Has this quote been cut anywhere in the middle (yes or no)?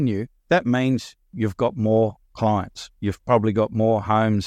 no